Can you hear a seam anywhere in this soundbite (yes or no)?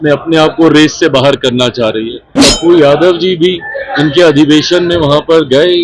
yes